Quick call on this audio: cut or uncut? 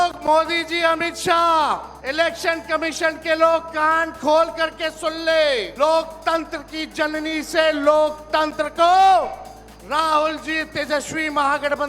cut